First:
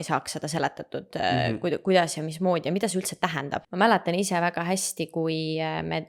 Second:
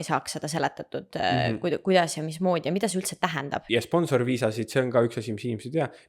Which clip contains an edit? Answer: second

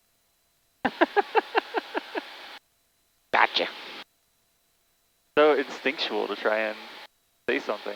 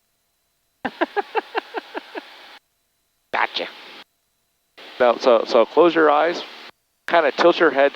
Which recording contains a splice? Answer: second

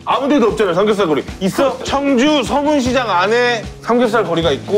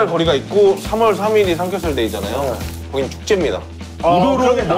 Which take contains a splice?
first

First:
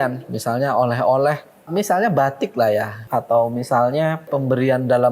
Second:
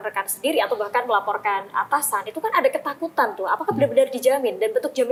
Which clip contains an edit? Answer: first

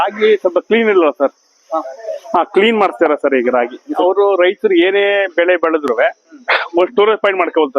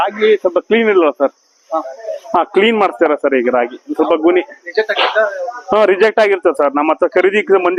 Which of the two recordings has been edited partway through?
first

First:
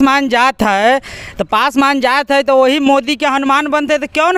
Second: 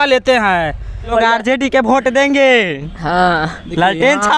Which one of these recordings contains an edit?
second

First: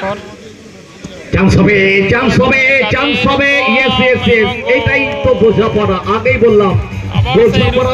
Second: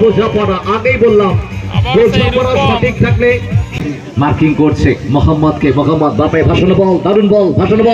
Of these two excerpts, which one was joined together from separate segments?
second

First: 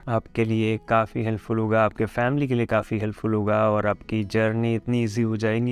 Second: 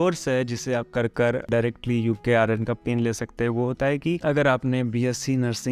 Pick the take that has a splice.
second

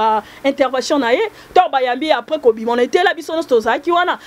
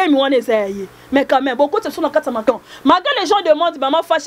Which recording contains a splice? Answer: second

